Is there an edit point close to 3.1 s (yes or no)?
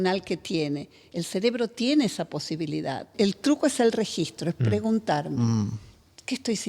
yes